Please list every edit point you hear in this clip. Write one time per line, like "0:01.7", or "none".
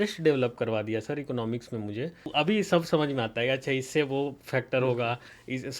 0:02.2